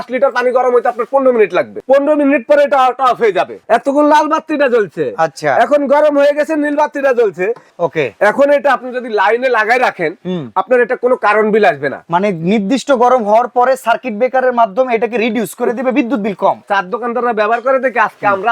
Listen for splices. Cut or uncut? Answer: cut